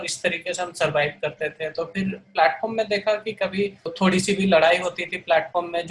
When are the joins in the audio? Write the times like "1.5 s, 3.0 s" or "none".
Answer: 3.9 s